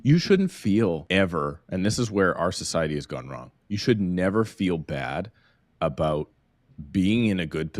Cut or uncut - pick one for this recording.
cut